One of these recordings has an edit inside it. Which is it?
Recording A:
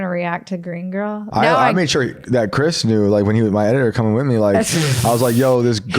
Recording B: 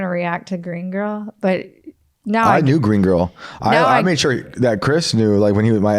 A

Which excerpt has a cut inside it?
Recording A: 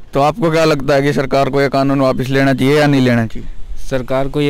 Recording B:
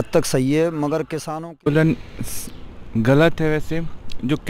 B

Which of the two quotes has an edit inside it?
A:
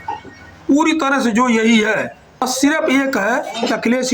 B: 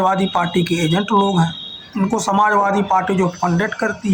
A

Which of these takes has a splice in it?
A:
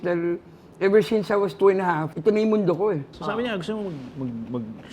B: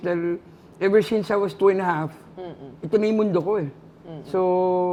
A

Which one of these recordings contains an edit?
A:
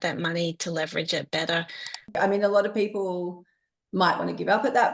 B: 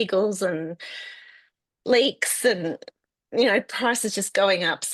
A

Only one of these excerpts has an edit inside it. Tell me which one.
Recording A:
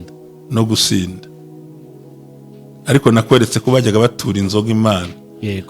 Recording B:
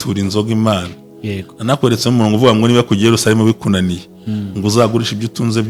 A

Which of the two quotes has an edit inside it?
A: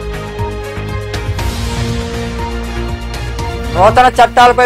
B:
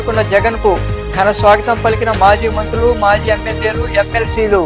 A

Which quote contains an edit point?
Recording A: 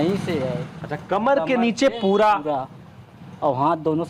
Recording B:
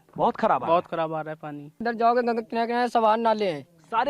B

